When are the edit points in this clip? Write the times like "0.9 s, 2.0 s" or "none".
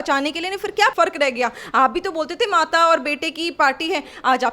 0.9 s